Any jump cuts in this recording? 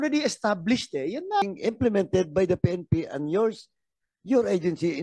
yes; 1 cut; at 1.4 s

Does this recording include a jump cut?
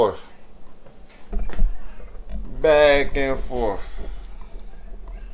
no; 0 cuts

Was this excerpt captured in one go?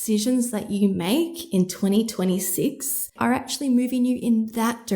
no; 1 cut; at 3.1 s

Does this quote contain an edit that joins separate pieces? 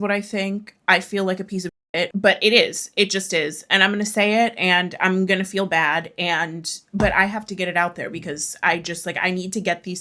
yes; 1 cut; at 2.1 s

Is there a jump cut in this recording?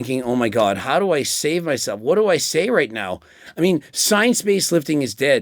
no; 0 cuts

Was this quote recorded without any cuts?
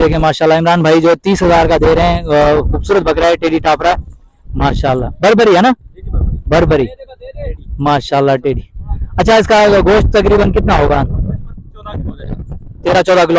yes; 0 cuts

